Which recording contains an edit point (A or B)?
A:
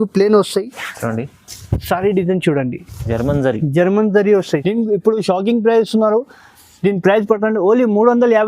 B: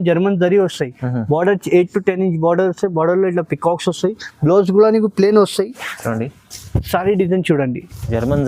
A